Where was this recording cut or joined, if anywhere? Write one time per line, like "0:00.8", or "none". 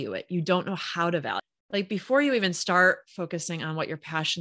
0:01.4